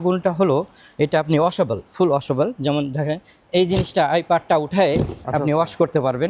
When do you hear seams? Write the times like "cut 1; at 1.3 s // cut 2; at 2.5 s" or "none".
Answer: none